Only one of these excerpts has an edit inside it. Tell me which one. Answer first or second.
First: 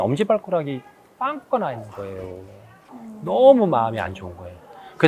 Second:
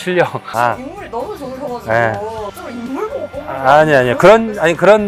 first